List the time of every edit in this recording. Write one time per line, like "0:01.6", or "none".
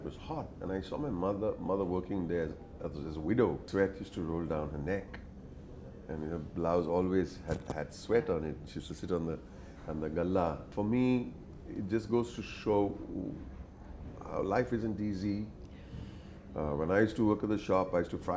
none